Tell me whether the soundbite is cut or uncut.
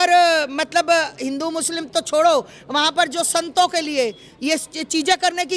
uncut